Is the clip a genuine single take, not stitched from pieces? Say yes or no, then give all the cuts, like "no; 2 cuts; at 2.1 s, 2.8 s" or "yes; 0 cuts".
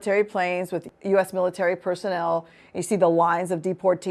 no; 1 cut; at 0.9 s